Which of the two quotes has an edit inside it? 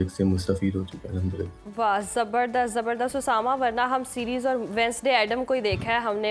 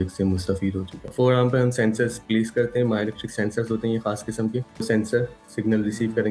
second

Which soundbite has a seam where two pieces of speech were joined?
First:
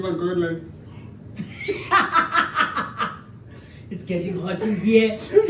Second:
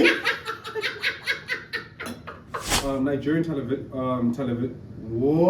second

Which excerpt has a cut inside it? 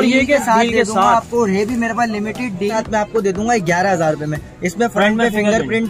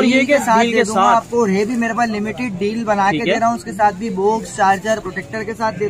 first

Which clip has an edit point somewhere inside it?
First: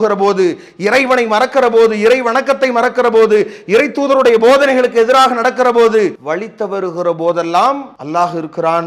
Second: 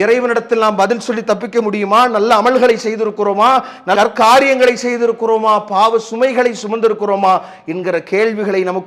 first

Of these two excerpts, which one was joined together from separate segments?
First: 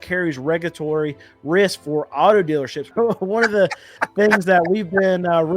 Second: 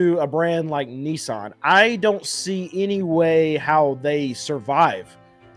first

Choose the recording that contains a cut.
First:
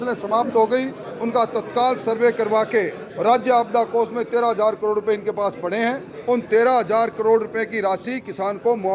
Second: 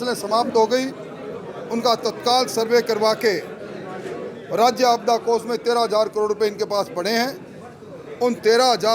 first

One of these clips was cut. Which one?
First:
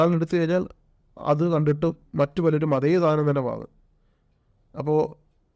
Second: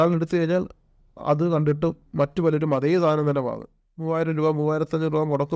second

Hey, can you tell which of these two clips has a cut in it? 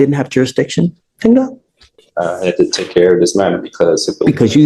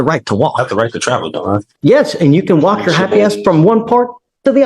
second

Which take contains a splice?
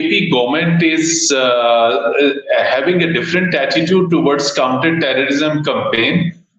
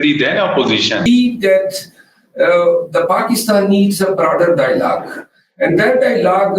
second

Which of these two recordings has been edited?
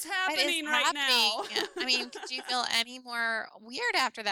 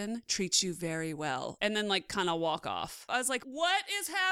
second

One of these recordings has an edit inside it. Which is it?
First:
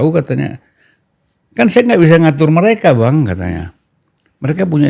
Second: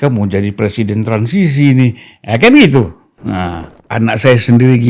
second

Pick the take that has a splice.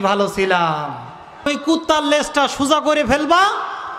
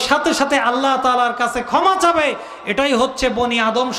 first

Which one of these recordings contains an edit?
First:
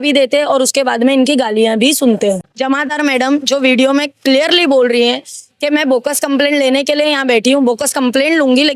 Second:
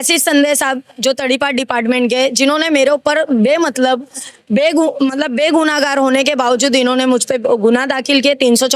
first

